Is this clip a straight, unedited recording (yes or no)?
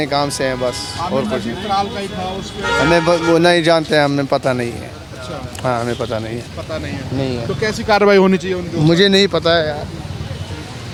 yes